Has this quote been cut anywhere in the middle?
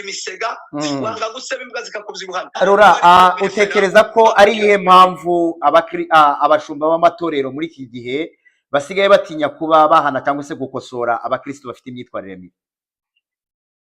yes; 1 cut; at 2.6 s

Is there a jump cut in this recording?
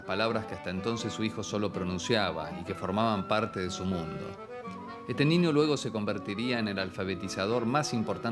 yes; 1 cut; at 4.5 s

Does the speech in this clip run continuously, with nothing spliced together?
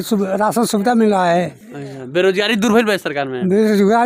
yes; 0 cuts

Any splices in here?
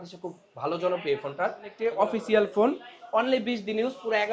yes; 1 cut; at 1.7 s

